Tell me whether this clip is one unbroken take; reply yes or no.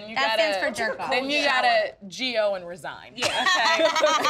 yes